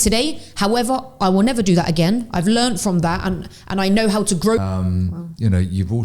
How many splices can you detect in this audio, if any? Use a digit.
1